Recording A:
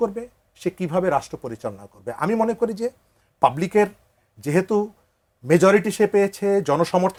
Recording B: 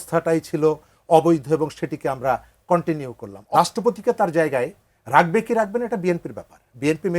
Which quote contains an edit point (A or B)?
B